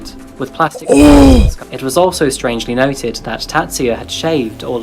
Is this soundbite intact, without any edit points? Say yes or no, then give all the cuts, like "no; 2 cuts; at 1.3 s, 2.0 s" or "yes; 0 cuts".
no; 1 cut; at 1.6 s